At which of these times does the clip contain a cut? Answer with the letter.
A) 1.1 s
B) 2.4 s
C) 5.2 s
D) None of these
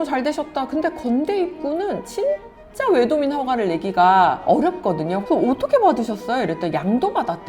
C